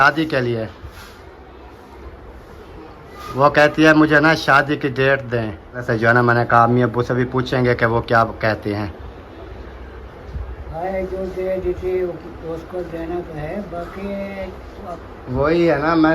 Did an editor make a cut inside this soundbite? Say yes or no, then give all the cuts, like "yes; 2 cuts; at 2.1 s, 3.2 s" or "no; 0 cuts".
yes; 3 cuts; at 5.8 s, 10.7 s, 15.0 s